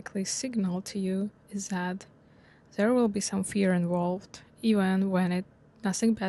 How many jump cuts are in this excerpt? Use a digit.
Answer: 0